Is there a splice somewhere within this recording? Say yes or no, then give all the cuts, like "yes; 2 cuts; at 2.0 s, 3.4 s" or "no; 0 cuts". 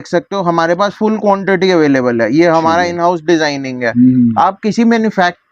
no; 0 cuts